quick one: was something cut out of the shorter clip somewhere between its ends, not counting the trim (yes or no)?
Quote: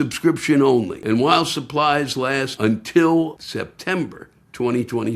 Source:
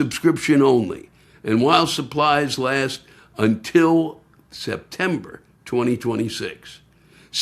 yes